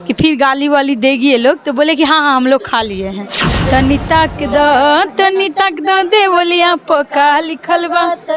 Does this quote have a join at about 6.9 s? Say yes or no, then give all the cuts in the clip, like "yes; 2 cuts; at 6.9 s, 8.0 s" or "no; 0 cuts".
no; 1 cut; at 3.5 s